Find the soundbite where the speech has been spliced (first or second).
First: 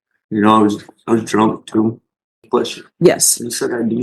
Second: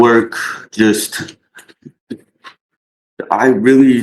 first